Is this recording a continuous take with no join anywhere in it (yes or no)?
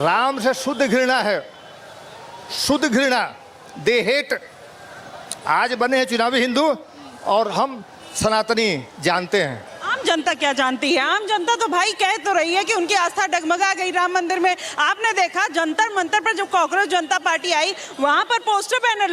yes